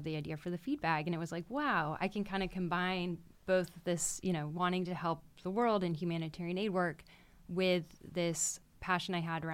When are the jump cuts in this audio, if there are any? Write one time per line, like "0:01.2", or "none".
0:08.5